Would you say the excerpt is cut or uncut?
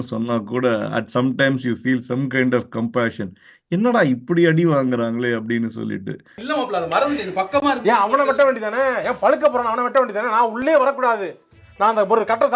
uncut